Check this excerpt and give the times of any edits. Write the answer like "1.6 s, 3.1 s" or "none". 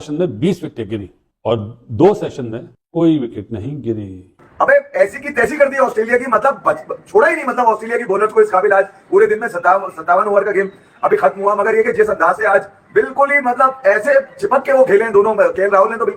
4.4 s